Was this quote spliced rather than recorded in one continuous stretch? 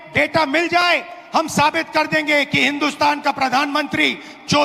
no; 0 cuts

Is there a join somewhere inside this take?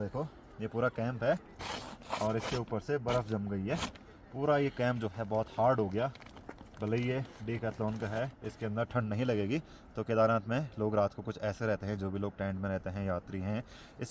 no; 0 cuts

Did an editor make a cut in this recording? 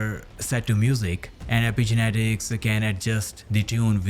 yes; 1 cut; at 1.3 s

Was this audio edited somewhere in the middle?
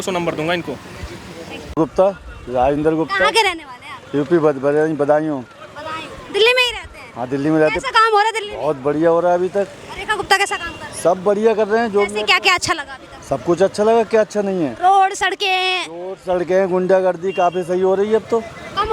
no; 0 cuts

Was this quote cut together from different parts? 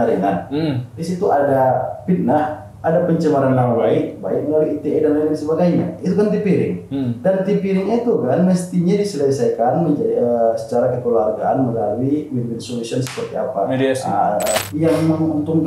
yes; 1 cut; at 14.6 s

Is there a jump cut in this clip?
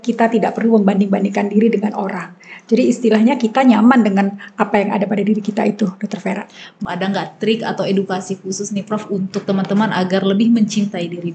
yes; 1 cut; at 6.7 s

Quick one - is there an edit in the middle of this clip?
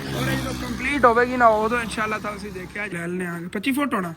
yes; 1 cut; at 2.8 s

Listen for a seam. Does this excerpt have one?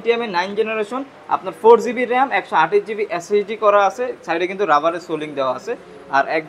no; 0 cuts

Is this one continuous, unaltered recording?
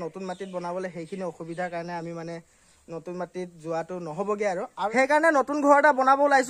no; 1 cut; at 4.7 s

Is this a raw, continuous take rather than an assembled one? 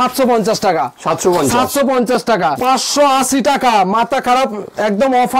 no; 1 cut; at 2.6 s

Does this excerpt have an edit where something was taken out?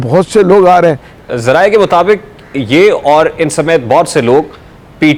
yes; 1 cut; at 1.1 s

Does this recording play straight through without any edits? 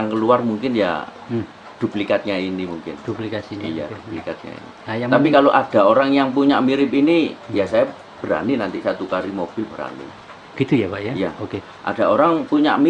yes; 0 cuts

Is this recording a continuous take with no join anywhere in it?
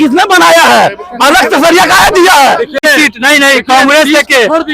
no; 1 cut; at 2.8 s

